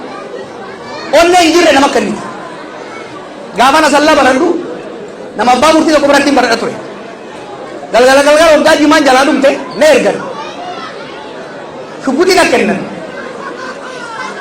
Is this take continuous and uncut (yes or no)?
yes